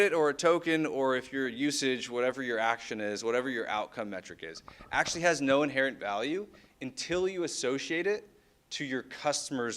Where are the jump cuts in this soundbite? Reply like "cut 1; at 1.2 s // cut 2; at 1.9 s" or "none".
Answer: none